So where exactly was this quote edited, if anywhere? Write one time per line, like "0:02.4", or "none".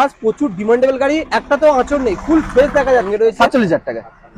0:03.1